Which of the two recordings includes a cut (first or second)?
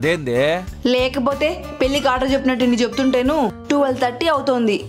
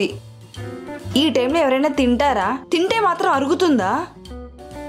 first